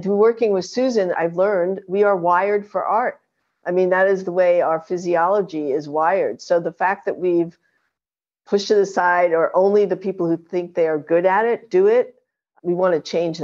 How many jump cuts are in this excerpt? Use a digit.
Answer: 2